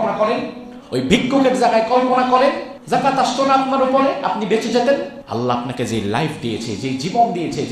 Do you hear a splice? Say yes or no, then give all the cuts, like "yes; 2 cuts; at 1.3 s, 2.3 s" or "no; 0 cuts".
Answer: yes; 2 cuts; at 2.7 s, 5.2 s